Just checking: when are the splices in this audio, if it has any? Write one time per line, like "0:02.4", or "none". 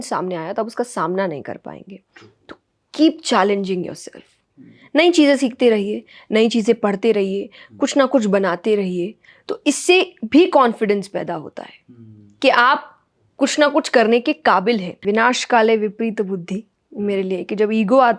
0:15.0